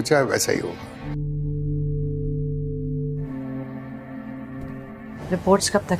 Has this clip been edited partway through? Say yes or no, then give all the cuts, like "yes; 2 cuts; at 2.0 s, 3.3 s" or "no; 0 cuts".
yes; 3 cuts; at 1.0 s, 3.3 s, 5.2 s